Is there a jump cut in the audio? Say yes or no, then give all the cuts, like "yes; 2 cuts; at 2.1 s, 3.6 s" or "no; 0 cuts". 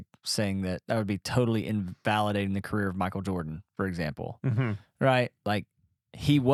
no; 0 cuts